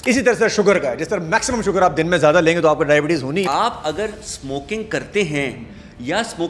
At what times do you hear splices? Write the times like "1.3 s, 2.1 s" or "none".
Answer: 3.5 s